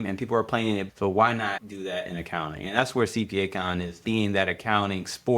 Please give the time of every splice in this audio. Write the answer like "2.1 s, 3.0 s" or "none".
0.8 s, 1.7 s, 3.9 s